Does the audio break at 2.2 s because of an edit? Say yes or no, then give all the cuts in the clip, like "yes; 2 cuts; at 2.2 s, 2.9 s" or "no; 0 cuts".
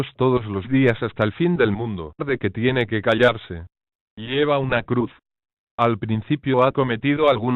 no; 0 cuts